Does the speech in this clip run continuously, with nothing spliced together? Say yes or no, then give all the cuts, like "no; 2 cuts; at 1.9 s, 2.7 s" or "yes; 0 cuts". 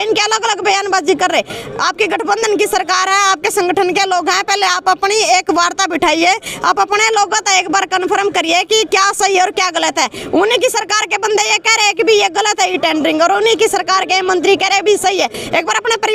yes; 0 cuts